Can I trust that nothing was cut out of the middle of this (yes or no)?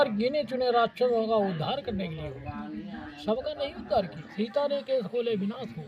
no